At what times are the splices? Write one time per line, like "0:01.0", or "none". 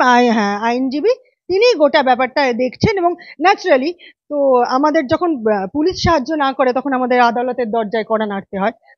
none

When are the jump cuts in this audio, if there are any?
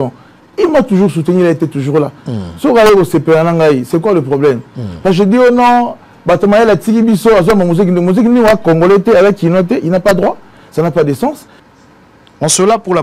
0:11.5

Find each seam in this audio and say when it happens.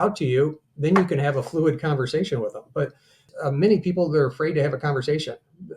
0:03.3

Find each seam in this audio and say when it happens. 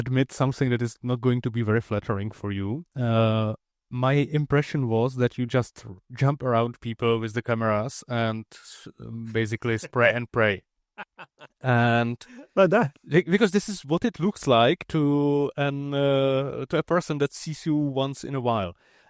none

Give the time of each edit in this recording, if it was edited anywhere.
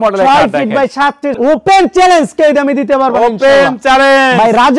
0:01.4

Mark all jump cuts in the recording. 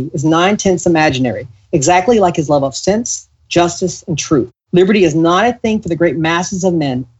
none

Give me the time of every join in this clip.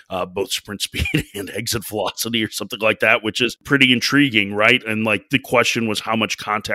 0:03.6

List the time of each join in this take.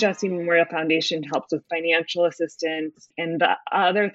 0:03.2

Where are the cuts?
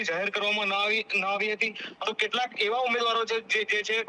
0:01.9

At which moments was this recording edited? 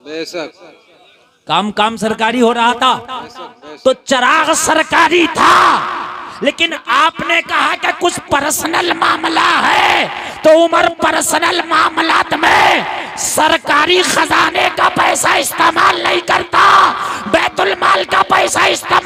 none

